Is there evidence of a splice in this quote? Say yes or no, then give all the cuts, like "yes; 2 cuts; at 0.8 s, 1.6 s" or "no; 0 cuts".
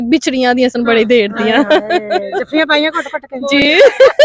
no; 0 cuts